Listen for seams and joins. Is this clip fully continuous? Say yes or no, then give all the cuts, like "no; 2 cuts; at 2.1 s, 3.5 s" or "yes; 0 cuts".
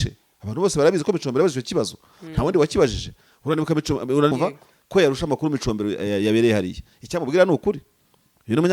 no; 1 cut; at 4.3 s